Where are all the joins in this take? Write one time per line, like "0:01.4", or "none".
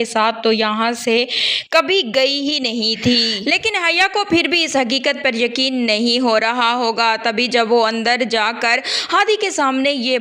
none